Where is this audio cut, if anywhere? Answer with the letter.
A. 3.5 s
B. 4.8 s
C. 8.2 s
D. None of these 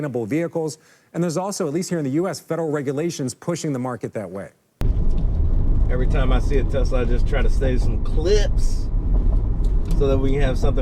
B